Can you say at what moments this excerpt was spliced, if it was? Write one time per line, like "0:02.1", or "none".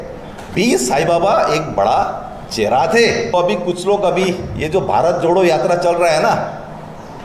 0:03.3